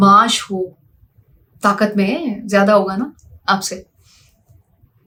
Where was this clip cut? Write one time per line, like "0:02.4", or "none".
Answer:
none